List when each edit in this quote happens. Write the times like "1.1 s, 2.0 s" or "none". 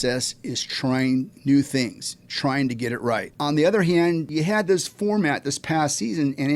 3.3 s, 4.3 s